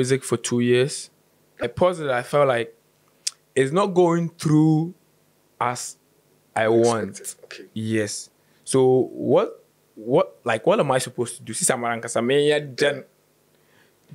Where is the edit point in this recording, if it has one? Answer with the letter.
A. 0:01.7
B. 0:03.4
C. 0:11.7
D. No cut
A